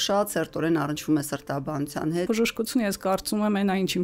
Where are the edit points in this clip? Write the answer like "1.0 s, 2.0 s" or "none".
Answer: 2.3 s